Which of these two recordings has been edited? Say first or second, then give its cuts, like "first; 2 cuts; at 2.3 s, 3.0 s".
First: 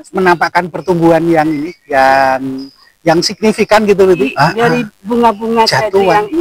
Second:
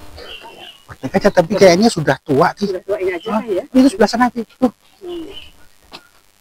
first; 1 cut; at 4.3 s